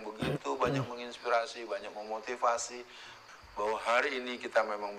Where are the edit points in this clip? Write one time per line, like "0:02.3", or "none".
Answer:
0:03.2